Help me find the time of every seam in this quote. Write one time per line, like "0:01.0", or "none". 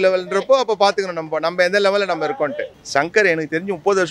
0:02.7

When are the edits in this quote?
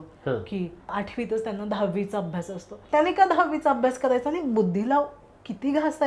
0:00.9
0:02.8

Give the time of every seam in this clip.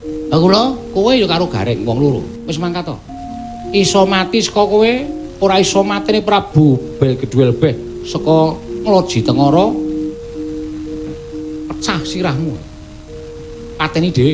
none

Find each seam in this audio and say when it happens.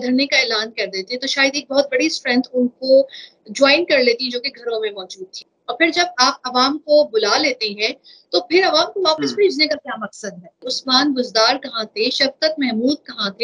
0:05.2
0:10.7

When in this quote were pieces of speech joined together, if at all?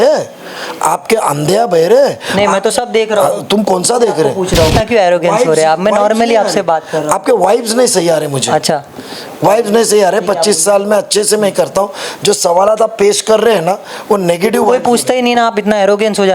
0:04.7

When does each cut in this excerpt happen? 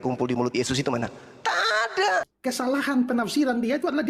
0:02.3

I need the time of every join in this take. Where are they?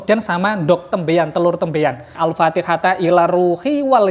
0:02.1

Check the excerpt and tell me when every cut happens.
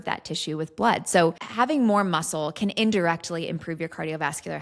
0:01.4

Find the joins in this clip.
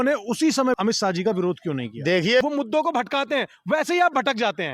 0:00.8
0:02.4

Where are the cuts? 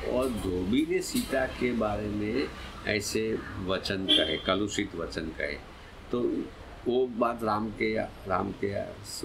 none

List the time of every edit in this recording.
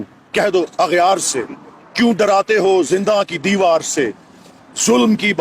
none

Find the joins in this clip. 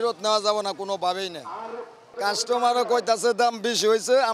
0:02.0

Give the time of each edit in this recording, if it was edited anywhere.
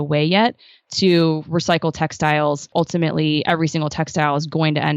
0:02.7

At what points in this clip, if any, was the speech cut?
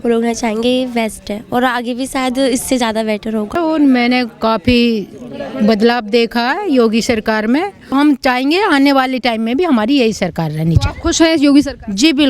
0:03.6
0:07.9

